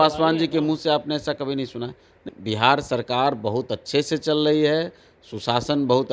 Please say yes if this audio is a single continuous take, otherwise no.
no